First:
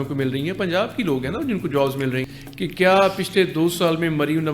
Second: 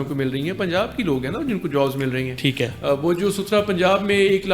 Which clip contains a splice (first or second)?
first